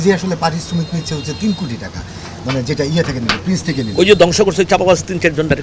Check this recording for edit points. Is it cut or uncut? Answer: uncut